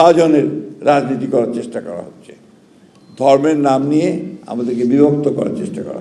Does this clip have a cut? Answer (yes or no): no